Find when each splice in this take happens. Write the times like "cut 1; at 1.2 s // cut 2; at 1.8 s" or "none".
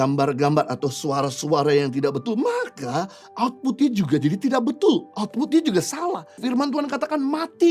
cut 1; at 6.4 s